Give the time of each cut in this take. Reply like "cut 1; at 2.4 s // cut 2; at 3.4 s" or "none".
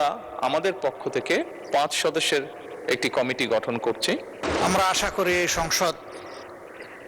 cut 1; at 4.5 s